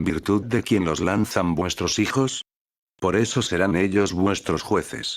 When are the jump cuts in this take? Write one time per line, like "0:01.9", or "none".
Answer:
0:02.5